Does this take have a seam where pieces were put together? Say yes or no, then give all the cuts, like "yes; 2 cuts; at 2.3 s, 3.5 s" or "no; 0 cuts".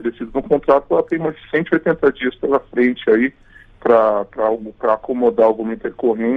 no; 0 cuts